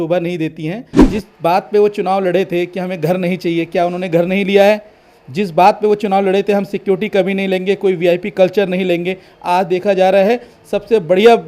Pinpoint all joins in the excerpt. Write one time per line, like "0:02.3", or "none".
0:00.9